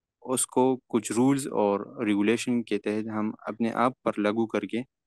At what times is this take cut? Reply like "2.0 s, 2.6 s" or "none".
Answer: none

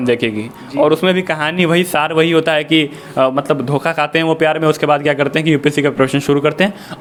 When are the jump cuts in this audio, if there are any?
none

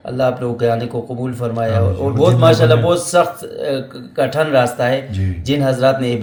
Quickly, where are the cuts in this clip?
none

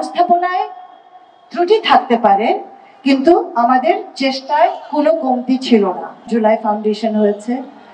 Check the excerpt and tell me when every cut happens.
6.3 s

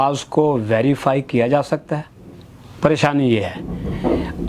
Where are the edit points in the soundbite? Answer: none

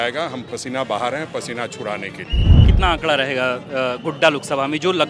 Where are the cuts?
2.7 s

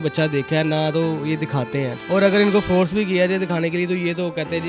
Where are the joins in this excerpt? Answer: 2.0 s

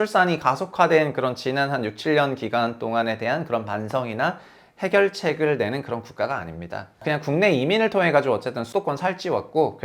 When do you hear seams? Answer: 7.0 s, 8.6 s

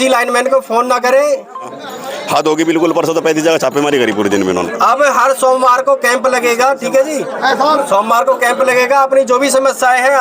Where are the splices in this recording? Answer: 1.8 s, 4.7 s

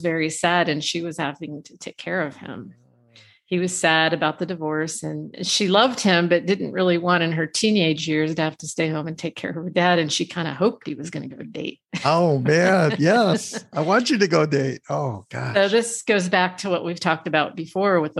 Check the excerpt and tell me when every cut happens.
none

